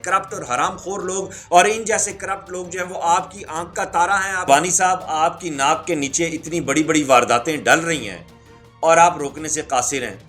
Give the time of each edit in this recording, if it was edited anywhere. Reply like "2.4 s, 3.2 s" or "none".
4.5 s